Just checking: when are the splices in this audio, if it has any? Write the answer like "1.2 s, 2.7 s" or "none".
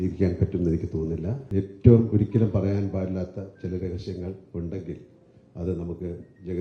1.4 s